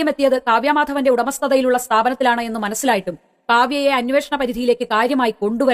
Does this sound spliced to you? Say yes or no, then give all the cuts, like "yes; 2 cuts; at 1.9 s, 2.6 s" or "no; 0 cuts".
no; 0 cuts